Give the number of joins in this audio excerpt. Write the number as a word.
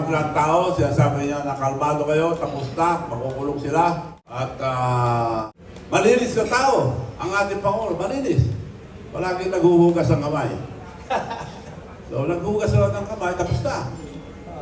two